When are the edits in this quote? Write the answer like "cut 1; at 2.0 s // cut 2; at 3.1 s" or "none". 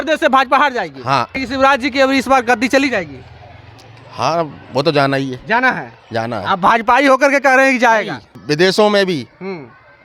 cut 1; at 1.4 s // cut 2; at 8.3 s